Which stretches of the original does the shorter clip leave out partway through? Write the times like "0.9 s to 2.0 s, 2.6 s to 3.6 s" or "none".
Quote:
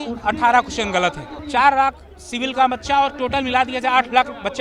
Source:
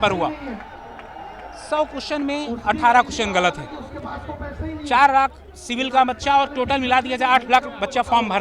3.7 s to 4.7 s